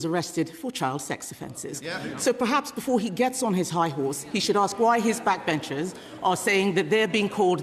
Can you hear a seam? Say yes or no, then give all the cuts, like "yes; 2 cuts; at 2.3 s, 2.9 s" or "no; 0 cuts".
no; 0 cuts